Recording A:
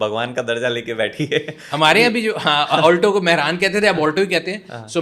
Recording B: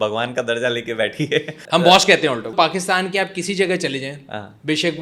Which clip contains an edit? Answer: B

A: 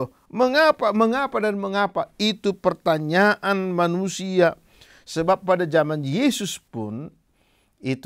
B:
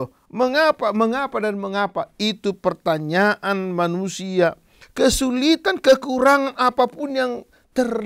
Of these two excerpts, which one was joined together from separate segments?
B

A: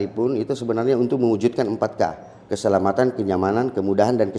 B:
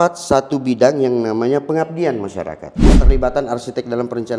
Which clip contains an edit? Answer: B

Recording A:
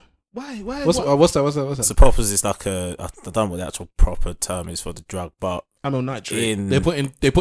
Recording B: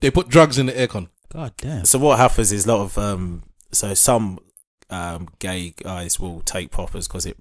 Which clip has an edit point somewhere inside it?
B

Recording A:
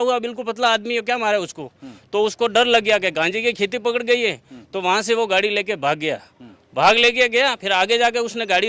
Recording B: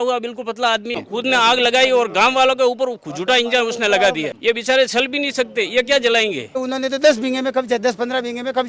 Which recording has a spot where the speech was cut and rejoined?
B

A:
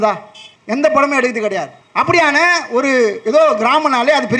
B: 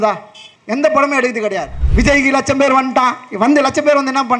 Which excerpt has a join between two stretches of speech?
B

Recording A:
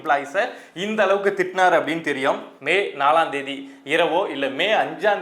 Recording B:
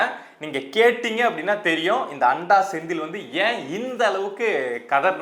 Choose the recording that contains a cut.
A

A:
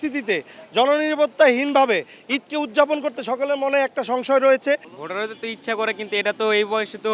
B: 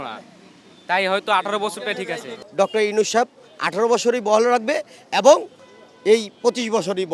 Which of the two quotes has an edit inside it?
A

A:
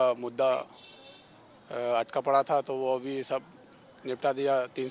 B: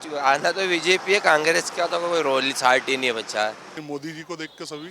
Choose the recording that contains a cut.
B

